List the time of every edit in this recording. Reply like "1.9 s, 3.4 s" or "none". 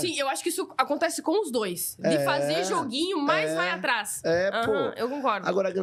none